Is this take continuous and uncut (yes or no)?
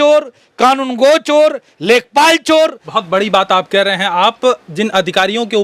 no